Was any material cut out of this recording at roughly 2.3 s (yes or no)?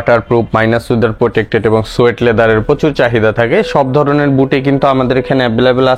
no